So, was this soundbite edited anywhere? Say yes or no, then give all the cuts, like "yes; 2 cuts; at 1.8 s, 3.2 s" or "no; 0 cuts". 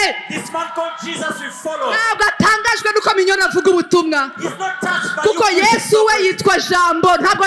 no; 0 cuts